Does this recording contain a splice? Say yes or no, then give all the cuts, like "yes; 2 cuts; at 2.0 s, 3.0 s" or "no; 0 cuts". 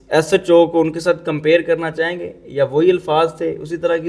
no; 0 cuts